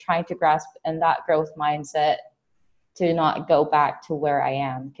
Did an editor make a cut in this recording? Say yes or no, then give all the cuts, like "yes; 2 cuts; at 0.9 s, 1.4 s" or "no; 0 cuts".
no; 0 cuts